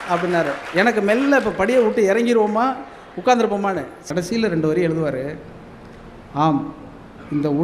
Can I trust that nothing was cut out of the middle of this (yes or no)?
no